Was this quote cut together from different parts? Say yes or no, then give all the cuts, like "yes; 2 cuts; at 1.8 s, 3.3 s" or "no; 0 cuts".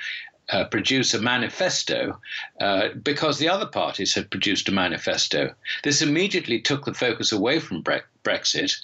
yes; 1 cut; at 2.7 s